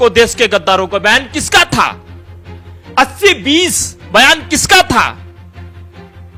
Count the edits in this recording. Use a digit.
0